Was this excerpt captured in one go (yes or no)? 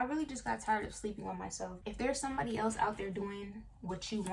no